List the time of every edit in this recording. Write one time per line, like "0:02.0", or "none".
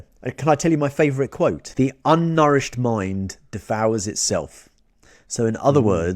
0:01.6